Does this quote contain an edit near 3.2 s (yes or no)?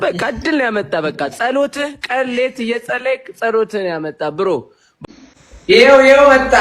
no